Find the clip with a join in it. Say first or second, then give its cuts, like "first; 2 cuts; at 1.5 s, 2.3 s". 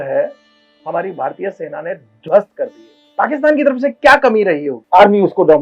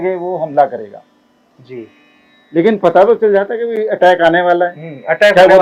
first; 2 cuts; at 3.0 s, 4.7 s